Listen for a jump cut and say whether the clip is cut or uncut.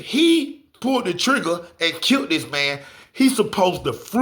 uncut